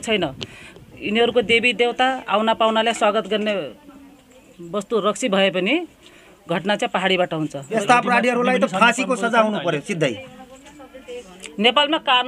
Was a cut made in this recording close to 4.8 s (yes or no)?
no